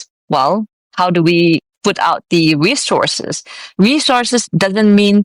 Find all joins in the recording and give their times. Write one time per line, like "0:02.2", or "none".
none